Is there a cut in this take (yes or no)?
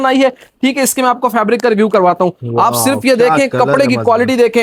no